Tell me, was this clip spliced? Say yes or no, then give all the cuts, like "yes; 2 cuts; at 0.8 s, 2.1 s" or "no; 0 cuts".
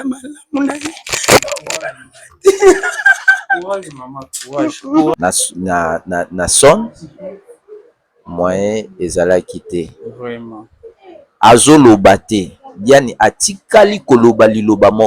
yes; 1 cut; at 5.1 s